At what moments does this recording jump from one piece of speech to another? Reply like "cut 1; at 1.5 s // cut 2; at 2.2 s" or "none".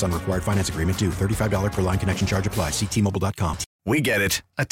cut 1; at 3.7 s